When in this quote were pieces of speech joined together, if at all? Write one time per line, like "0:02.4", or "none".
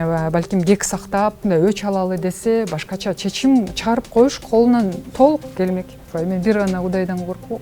0:01.4
0:05.0
0:06.0